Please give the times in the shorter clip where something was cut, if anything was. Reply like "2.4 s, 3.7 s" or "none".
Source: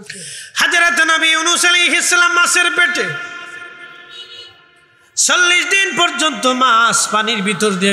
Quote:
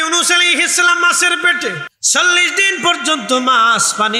1.9 s

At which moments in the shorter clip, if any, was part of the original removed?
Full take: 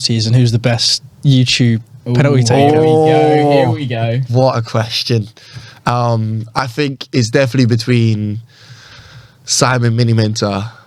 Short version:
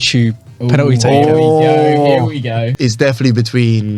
2.7 s

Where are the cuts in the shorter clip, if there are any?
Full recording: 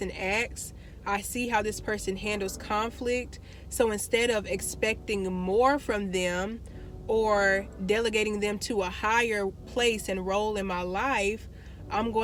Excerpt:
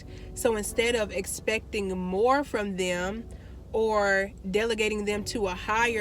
none

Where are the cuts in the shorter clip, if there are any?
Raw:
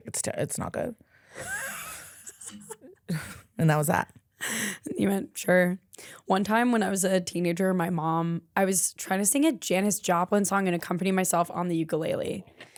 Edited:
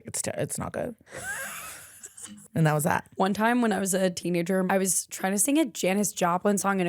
1.0 s, 2.4 s, 3.1 s, 4.7 s

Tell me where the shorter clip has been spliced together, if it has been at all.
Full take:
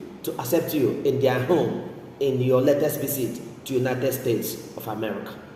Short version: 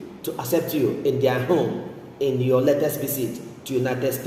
none

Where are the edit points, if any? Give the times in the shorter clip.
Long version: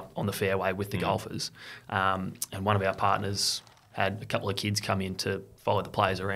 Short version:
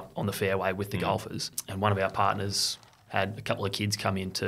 1.6 s

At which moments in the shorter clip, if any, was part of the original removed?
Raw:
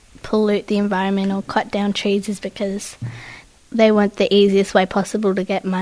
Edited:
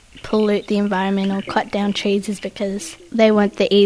2.9 s

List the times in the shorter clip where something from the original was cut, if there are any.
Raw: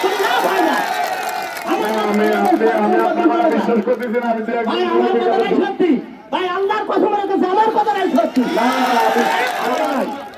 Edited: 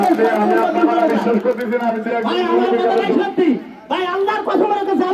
none

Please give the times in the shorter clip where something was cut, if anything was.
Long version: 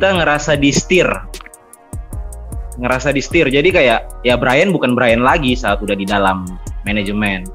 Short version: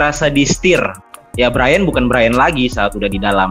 1.2 s

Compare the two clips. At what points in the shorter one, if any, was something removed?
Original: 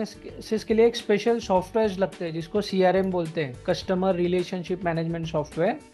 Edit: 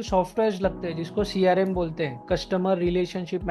none

